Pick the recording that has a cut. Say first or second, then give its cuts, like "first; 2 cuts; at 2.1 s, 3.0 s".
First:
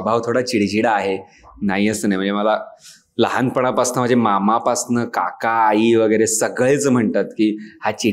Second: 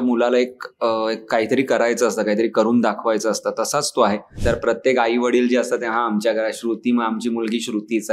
second; 1 cut; at 4.3 s